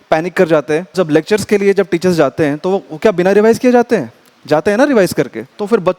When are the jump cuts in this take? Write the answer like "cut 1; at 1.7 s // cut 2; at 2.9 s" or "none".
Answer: cut 1; at 0.9 s

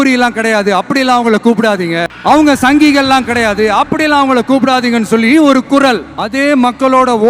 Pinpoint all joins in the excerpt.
cut 1; at 2.1 s // cut 2; at 6.2 s

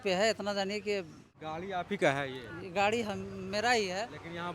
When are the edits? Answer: cut 1; at 1.3 s

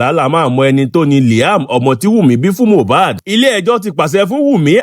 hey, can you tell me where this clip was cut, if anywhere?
none

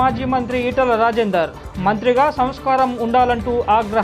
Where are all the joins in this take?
none

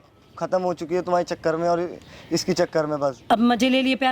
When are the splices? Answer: cut 1; at 3.2 s

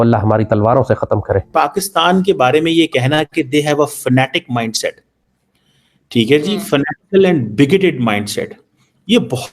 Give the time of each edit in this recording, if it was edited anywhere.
cut 1; at 1.5 s

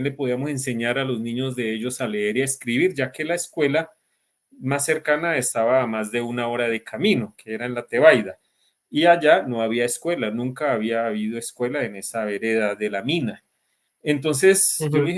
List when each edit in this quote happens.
none

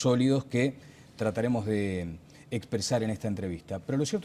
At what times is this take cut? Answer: none

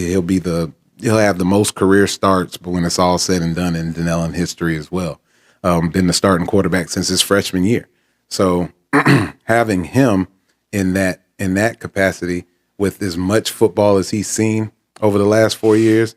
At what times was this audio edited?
none

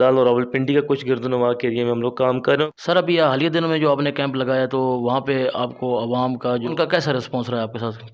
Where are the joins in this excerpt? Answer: cut 1; at 2.6 s // cut 2; at 6.7 s

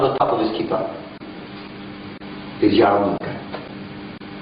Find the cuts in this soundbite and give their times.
cut 1; at 1.5 s

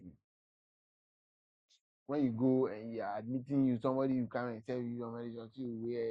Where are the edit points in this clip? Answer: none

